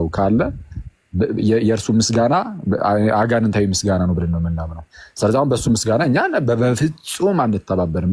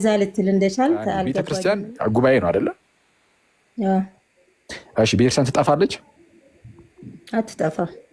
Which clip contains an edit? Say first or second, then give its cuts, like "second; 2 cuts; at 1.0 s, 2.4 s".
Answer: second; 1 cut; at 1.4 s